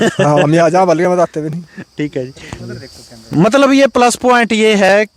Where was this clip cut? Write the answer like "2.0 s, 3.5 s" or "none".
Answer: none

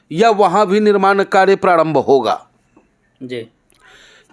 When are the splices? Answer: none

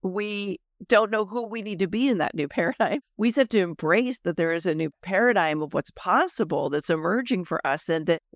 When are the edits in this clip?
none

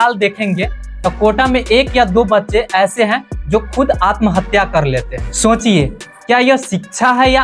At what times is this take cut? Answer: none

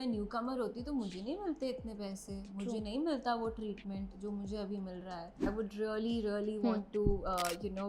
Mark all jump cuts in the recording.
5.5 s

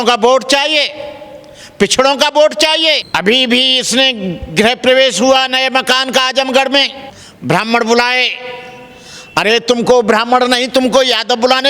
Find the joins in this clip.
3.0 s

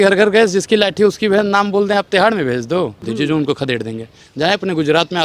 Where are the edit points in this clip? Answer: 3.0 s

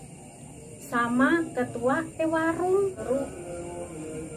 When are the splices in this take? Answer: 3.0 s

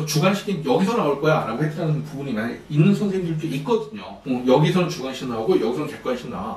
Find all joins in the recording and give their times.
4.1 s

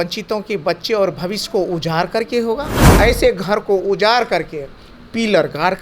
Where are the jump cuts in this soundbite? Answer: 2.8 s

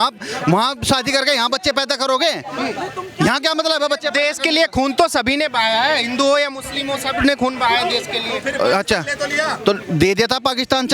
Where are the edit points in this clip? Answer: none

